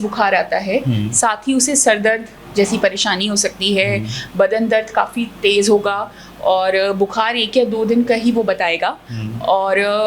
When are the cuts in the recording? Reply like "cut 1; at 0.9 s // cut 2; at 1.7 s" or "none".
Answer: none

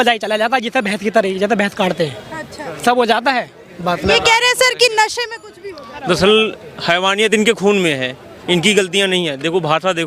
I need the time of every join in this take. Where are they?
cut 1; at 3.6 s

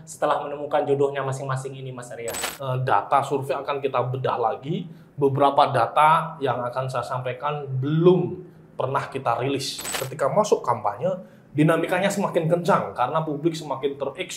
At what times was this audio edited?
cut 1; at 2.5 s // cut 2; at 10.0 s

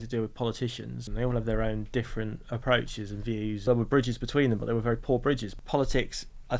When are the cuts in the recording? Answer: cut 1; at 1.1 s // cut 2; at 3.6 s // cut 3; at 5.5 s

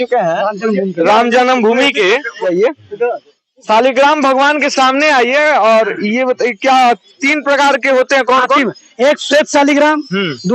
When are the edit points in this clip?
cut 1; at 2.5 s

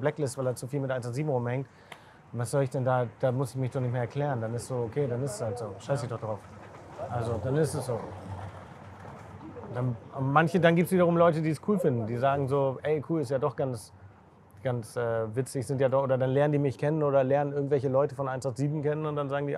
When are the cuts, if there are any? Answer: none

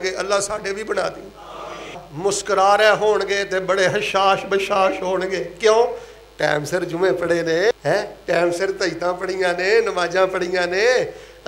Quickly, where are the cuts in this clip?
cut 1; at 2.0 s // cut 2; at 7.7 s

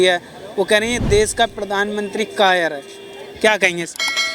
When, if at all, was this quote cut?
none

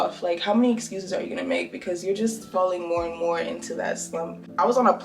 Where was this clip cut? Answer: none

